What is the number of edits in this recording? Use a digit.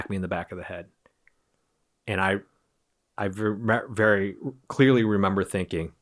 0